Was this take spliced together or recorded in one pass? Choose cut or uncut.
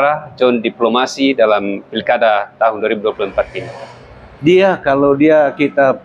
uncut